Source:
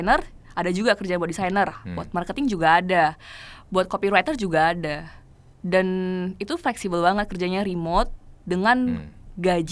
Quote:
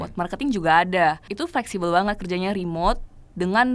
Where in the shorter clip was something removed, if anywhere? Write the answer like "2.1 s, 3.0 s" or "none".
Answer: 1.3 s